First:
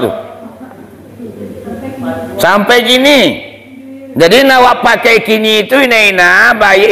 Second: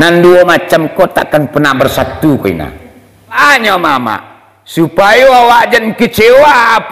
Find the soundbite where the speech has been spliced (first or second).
second